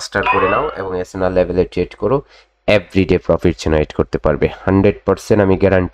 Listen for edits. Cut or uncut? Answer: uncut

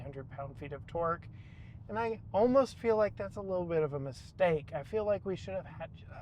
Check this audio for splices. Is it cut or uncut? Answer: uncut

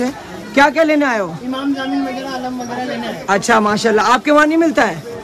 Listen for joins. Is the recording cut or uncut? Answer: uncut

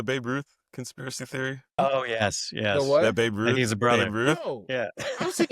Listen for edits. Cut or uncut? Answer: cut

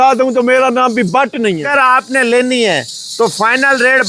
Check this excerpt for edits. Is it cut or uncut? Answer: cut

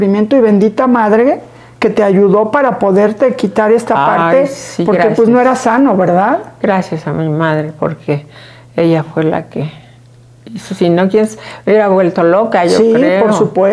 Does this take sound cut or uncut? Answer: uncut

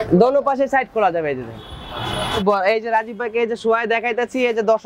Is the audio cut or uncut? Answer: cut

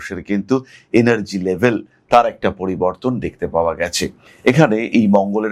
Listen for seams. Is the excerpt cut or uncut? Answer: cut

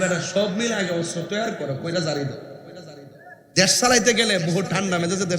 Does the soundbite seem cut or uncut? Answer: uncut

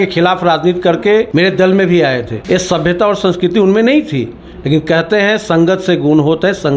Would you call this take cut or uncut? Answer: cut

